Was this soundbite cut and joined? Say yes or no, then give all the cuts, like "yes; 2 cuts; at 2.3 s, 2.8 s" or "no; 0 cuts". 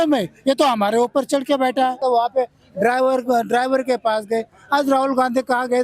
yes; 1 cut; at 2.0 s